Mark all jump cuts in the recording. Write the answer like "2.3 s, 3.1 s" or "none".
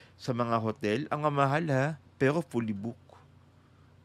none